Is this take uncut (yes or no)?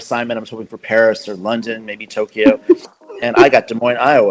yes